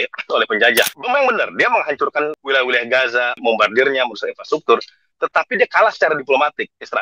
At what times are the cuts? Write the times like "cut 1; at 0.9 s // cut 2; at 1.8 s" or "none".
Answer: cut 1; at 0.9 s // cut 2; at 2.4 s